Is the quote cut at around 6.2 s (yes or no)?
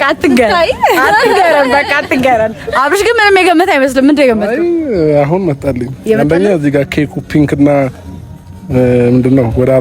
no